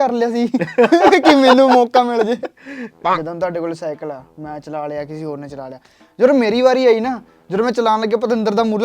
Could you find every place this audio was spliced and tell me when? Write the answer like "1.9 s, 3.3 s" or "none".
3.0 s